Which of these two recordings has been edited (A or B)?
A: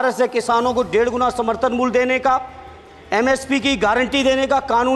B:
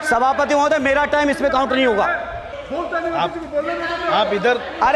B